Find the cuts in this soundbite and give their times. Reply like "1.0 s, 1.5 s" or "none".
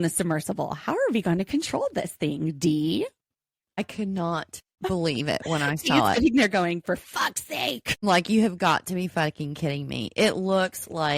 none

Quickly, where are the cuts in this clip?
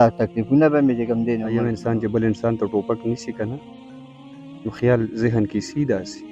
1.5 s

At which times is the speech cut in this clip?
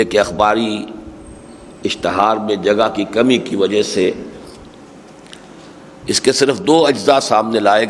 none

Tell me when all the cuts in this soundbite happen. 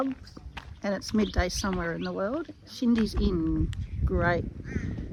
none

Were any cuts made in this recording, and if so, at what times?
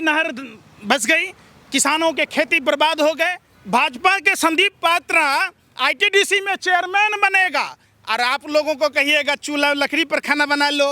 3.4 s

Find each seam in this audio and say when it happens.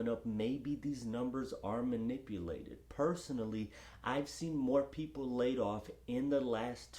none

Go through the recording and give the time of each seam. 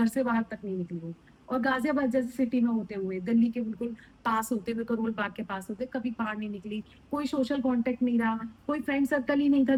none

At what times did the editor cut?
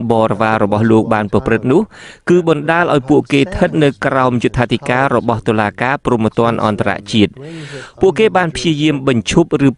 7.1 s

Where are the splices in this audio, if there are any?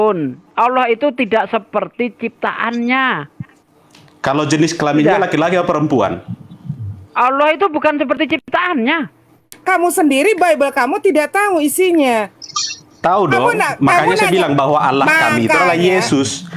9.5 s

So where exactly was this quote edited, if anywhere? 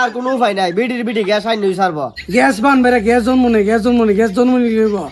2.1 s

